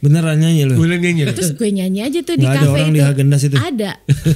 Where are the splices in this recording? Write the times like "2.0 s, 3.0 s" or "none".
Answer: 1.3 s